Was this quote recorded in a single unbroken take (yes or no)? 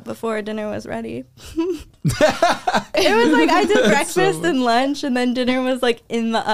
no